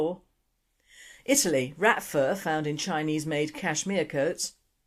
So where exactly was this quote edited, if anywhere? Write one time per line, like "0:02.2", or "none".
0:01.7